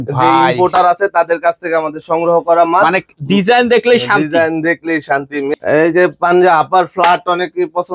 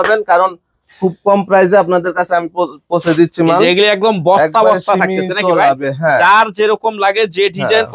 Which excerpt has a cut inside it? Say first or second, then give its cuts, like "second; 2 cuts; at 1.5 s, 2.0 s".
first; 1 cut; at 5.5 s